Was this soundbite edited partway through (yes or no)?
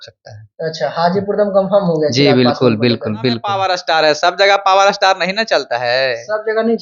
yes